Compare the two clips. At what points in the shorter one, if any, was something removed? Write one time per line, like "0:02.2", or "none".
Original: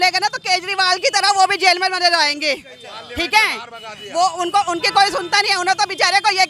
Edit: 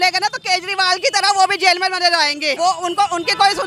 0:02.5